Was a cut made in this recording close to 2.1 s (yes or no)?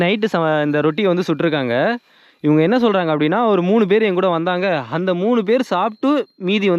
no